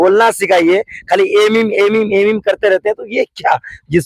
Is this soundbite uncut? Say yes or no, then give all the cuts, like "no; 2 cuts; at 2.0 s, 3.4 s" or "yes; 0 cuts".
yes; 0 cuts